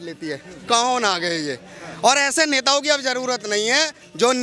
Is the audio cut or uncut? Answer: uncut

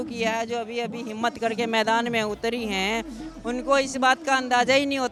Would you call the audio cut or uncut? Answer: uncut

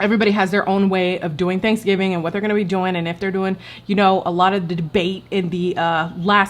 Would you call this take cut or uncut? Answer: uncut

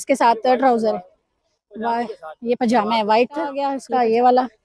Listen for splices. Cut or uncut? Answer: cut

